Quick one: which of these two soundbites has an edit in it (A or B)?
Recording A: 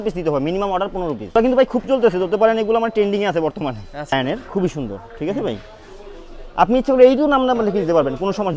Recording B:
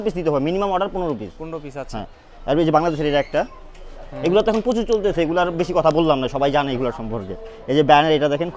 A